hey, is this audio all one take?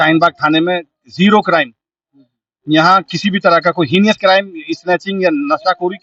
yes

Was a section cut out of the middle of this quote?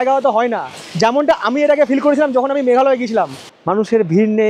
yes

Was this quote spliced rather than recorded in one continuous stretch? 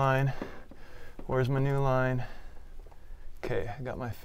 no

